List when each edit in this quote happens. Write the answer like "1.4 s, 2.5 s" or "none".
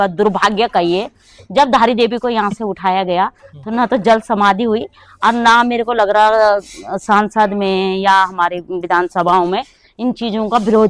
none

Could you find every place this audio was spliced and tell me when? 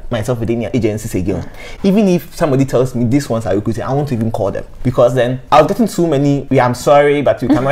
none

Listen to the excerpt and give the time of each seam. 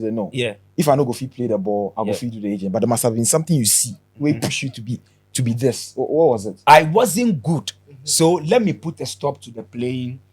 6.5 s

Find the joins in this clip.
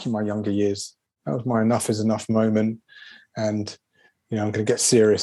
1.2 s

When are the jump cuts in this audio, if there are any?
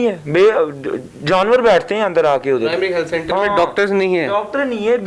none

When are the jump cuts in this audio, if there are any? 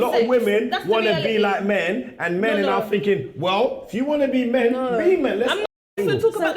5.7 s

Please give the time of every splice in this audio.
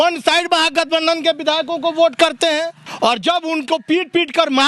2.8 s

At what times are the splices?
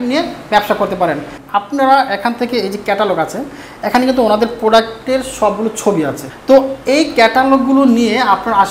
1.3 s, 6.3 s

